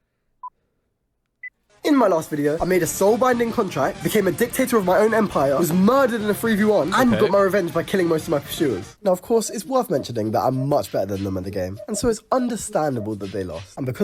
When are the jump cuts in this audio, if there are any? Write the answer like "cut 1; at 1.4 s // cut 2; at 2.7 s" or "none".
cut 1; at 6.8 s // cut 2; at 9.9 s // cut 3; at 12.8 s